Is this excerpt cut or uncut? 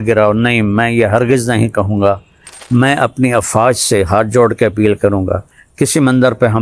cut